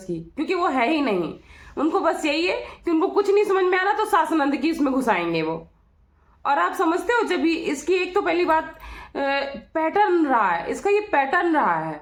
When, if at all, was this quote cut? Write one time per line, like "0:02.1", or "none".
none